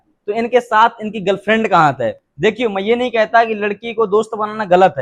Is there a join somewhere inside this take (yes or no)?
no